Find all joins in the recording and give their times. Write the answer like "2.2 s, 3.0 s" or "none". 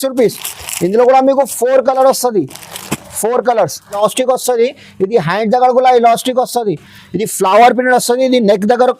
4.0 s

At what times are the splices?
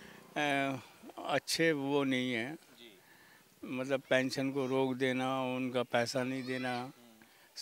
none

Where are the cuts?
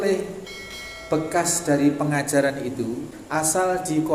3.1 s

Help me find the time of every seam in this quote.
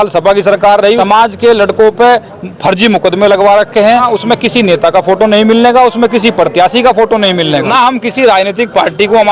1.0 s, 4.1 s, 7.7 s

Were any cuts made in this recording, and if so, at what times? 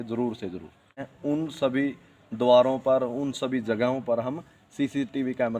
1.1 s

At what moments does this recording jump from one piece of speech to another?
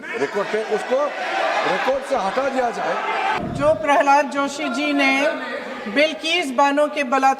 3.4 s

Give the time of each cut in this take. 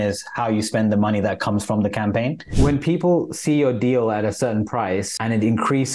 2.4 s

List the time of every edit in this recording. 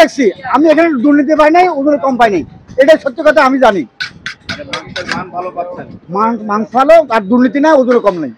none

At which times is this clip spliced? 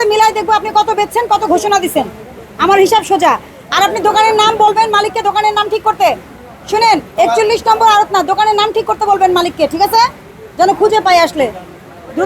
none

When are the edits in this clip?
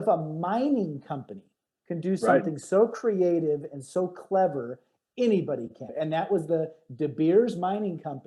5.8 s

